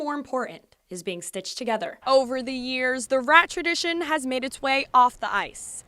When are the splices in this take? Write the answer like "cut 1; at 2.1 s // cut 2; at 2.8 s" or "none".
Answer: cut 1; at 2.0 s